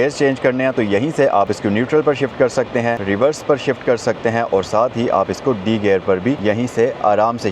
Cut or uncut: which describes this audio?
cut